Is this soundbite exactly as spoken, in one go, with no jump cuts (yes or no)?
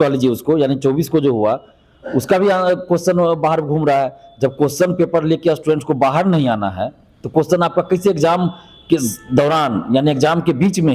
yes